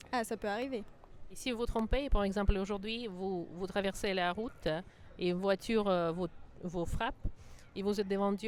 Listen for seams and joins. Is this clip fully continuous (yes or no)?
yes